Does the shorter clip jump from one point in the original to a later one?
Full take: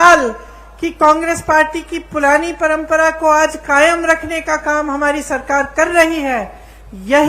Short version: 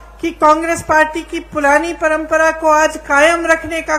no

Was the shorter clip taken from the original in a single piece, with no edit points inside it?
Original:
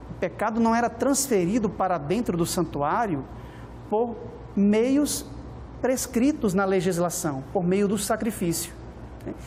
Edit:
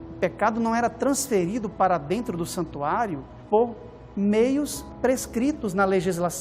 no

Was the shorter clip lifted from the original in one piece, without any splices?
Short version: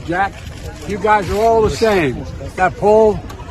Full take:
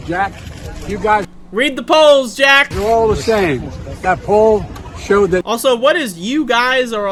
no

